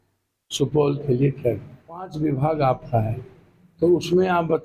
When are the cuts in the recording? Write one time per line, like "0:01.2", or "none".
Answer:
0:02.1